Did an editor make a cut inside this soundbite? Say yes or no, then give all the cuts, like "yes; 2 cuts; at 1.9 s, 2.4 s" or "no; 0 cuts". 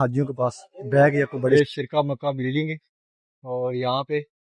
yes; 1 cut; at 1.5 s